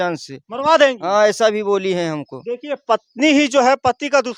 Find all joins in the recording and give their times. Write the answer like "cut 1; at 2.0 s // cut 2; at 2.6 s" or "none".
none